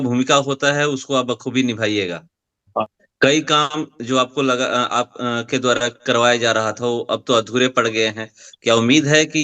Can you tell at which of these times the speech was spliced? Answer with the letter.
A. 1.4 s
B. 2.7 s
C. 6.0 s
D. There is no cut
B